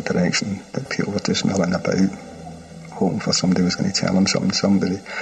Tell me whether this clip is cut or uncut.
uncut